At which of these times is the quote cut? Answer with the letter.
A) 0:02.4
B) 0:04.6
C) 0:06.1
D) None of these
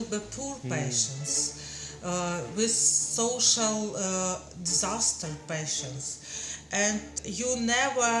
D